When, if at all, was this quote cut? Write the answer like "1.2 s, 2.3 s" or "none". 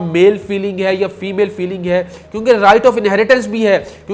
none